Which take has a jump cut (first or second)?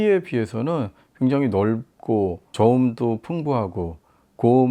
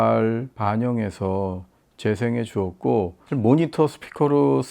second